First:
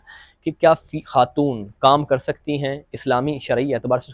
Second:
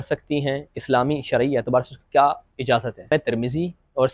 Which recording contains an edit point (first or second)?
second